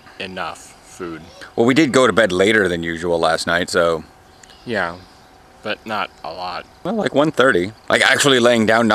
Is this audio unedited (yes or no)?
no